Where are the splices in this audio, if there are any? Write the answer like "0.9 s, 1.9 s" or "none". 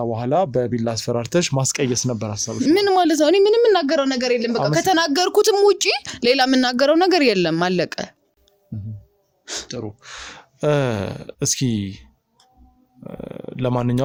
none